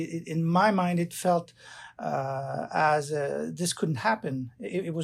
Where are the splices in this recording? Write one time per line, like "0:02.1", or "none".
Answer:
none